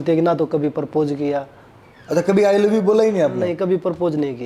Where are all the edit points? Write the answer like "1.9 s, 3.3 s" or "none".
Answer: none